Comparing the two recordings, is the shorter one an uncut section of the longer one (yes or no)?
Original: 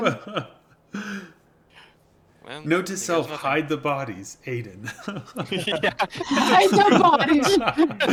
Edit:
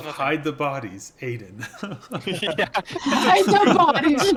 yes